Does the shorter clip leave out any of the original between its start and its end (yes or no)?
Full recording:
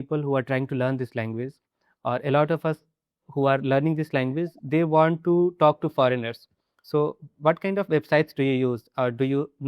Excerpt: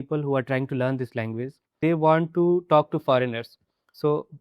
yes